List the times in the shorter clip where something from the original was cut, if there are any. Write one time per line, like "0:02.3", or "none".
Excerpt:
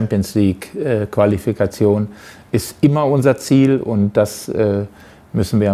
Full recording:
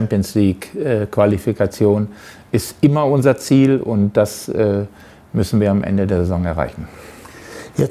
none

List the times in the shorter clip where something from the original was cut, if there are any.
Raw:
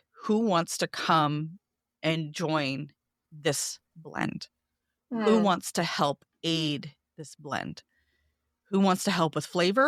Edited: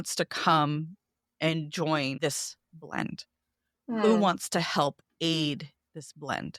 0:02.2

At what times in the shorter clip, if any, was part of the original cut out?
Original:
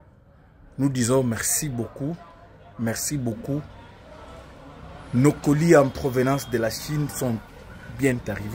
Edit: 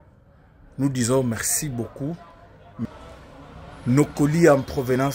0:02.9

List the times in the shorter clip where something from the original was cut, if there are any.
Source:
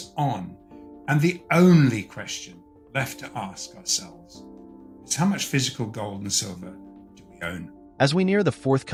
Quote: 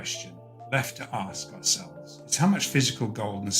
0:02.2

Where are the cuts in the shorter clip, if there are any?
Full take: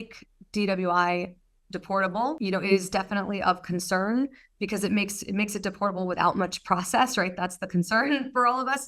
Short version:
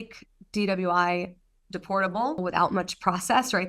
0:02.4

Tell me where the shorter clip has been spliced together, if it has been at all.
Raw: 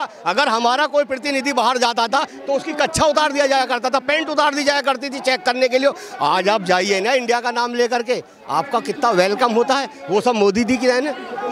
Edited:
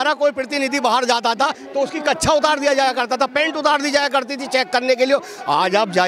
none

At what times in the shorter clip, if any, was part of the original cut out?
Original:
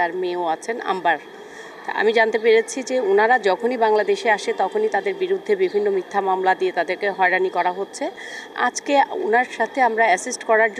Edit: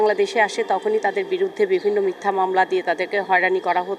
none

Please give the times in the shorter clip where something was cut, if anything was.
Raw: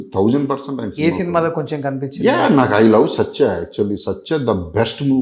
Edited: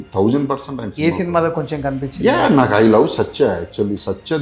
none

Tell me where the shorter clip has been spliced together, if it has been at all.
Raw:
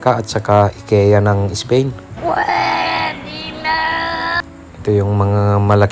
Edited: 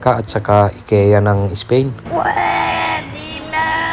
0:02.0

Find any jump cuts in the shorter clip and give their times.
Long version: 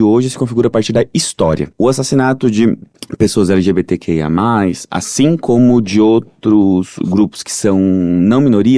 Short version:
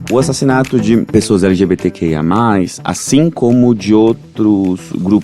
0:01.1

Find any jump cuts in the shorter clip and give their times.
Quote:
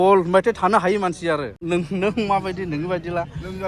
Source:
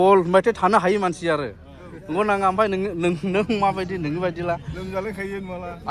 0:01.6

